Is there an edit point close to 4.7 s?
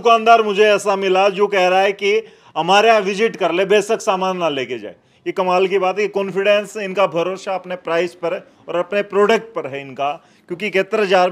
no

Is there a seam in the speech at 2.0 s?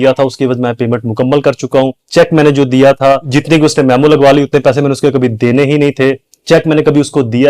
yes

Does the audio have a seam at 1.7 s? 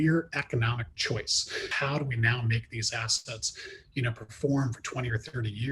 yes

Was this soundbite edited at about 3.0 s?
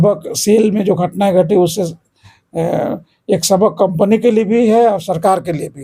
no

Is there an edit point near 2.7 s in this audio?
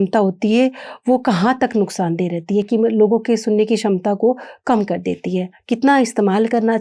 no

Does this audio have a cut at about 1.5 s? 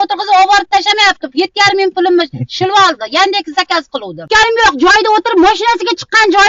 no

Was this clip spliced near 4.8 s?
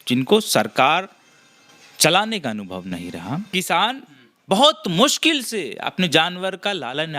no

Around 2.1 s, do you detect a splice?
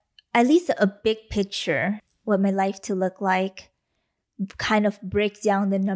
yes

